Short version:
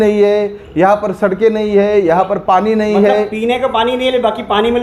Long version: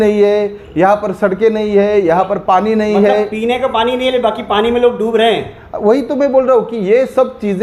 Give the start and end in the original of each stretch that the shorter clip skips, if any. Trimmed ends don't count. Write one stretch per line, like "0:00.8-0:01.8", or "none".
none